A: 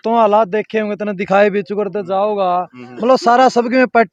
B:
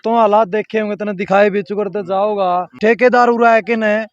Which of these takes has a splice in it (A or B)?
B